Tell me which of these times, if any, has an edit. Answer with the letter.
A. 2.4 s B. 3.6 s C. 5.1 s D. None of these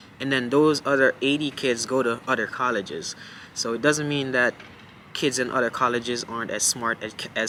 D